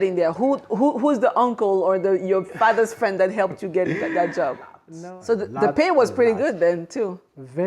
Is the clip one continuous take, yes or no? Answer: no